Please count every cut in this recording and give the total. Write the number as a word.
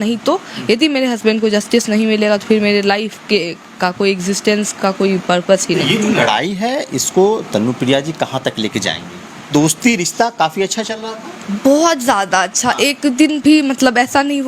two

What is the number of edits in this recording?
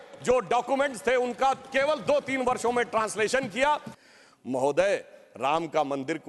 one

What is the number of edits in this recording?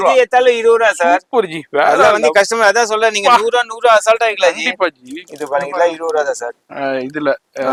zero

